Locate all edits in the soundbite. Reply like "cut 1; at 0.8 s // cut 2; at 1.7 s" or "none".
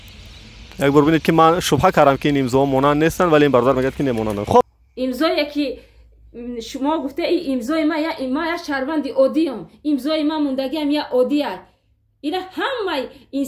cut 1; at 4.8 s